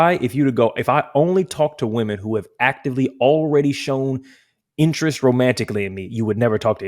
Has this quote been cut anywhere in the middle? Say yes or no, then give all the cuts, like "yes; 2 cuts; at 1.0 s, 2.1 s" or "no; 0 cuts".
no; 0 cuts